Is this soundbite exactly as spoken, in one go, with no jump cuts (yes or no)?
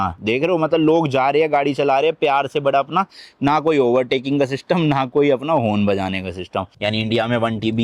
no